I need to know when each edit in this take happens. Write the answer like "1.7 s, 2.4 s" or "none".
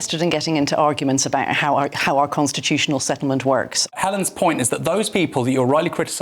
3.8 s